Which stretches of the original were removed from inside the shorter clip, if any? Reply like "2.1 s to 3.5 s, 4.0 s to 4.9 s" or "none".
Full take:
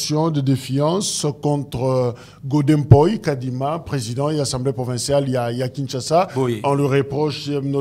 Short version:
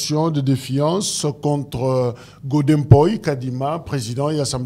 none